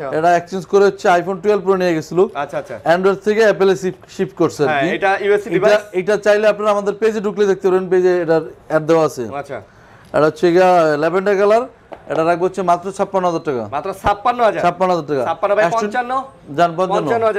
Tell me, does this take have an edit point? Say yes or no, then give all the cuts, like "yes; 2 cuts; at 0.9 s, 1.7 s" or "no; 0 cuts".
no; 0 cuts